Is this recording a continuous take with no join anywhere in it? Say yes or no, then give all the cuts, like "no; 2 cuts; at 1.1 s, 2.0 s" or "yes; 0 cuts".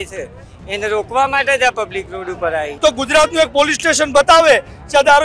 no; 1 cut; at 2.7 s